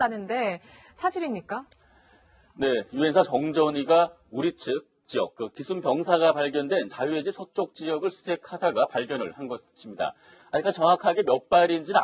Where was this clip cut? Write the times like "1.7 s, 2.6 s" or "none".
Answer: 8.1 s